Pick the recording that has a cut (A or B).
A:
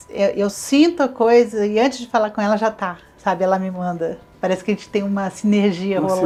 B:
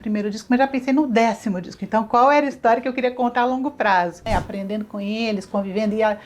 B